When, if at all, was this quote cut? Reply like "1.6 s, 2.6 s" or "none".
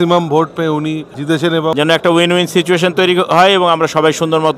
1.4 s